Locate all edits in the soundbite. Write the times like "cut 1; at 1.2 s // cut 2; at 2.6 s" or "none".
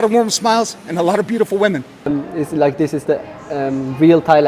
cut 1; at 1.9 s